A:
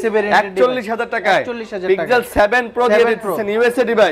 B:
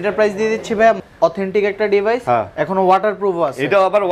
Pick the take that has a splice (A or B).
B